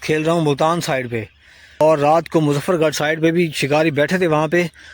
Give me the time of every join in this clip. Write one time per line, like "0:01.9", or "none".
0:01.8